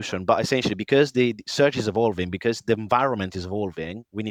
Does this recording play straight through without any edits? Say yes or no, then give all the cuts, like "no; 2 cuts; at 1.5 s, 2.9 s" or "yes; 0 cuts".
yes; 0 cuts